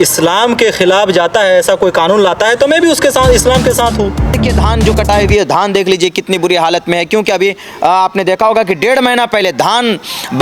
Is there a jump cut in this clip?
yes; 1 cut; at 4.4 s

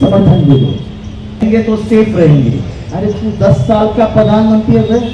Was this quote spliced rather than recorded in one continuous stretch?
yes; 1 cut; at 1.4 s

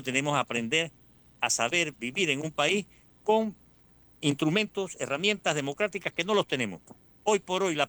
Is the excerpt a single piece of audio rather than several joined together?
yes; 0 cuts

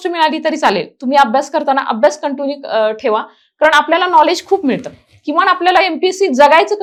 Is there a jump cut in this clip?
no; 0 cuts

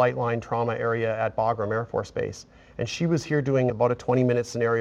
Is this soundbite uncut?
no; 1 cut; at 3.7 s

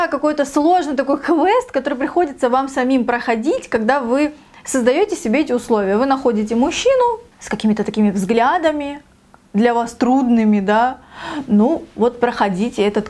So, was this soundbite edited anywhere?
no; 0 cuts

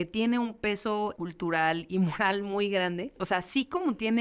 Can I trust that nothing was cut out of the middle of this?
no; 2 cuts; at 1.2 s, 3.1 s

